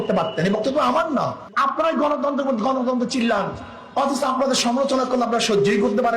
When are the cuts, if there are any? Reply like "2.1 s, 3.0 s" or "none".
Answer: 1.4 s